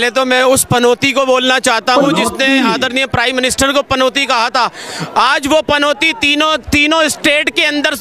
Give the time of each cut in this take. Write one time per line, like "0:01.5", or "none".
none